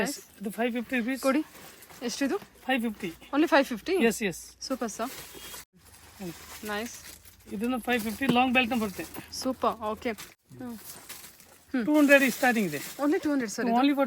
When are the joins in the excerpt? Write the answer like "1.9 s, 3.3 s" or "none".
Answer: 5.7 s, 10.3 s